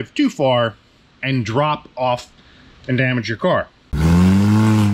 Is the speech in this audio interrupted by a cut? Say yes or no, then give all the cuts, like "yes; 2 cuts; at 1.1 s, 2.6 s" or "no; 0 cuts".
yes; 1 cut; at 3.9 s